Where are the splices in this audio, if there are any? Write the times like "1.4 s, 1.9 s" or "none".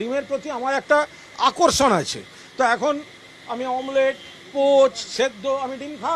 none